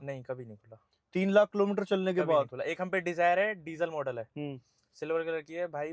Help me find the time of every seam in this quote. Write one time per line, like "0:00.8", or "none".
none